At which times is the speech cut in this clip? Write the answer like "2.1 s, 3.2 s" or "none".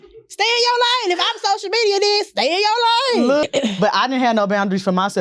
3.4 s